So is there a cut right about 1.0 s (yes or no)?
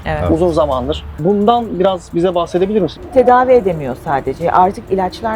yes